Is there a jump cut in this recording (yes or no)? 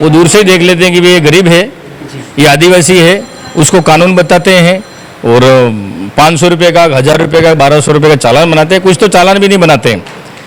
no